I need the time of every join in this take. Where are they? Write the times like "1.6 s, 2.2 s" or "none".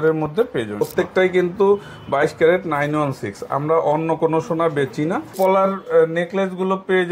0.8 s, 5.3 s